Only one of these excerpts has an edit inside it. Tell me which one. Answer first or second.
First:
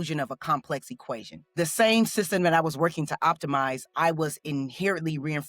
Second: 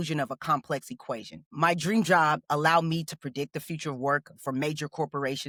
first